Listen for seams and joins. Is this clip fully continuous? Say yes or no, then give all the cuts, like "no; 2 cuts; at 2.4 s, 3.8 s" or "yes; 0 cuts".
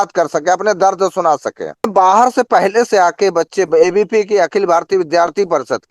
no; 1 cut; at 1.9 s